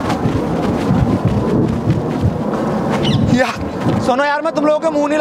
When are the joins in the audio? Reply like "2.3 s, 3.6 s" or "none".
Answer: none